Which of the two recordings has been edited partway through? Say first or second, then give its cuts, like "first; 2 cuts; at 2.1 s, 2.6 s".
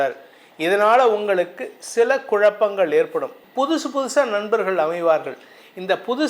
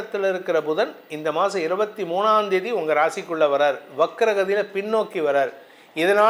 first; 1 cut; at 3.4 s